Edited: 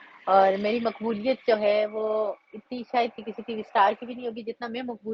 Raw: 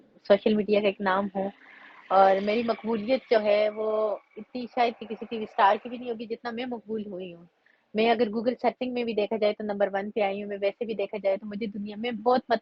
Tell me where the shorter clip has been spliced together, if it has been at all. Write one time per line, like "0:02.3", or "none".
none